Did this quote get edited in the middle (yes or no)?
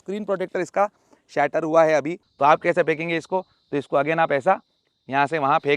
yes